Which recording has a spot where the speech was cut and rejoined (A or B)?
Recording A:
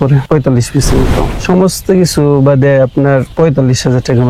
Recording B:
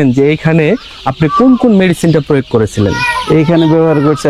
A